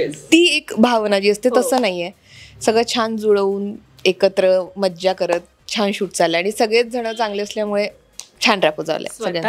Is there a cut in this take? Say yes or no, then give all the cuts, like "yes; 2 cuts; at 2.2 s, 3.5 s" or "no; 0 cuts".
no; 0 cuts